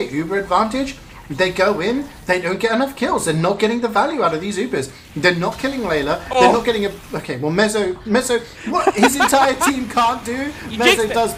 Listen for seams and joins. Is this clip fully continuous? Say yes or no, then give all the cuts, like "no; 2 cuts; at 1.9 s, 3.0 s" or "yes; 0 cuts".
yes; 0 cuts